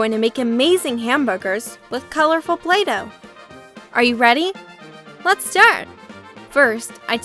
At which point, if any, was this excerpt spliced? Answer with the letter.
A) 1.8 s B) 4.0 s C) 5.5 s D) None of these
D